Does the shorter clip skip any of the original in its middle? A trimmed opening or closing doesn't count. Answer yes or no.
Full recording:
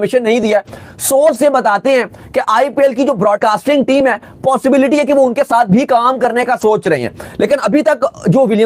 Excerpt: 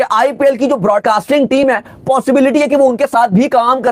no